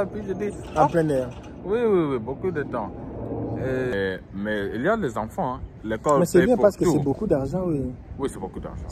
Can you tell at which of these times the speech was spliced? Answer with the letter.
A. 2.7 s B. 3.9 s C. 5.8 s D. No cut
B